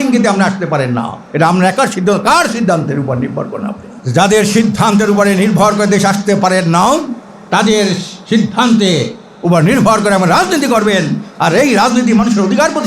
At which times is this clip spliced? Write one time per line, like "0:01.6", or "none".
0:01.2
0:03.9